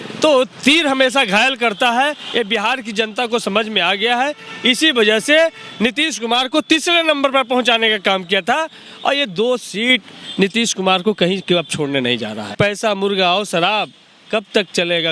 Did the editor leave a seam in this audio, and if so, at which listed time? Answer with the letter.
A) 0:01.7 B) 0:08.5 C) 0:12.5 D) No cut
C